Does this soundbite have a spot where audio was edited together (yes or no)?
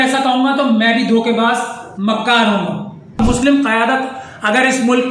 yes